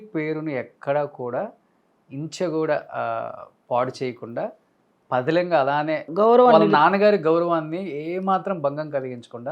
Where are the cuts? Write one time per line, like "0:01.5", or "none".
none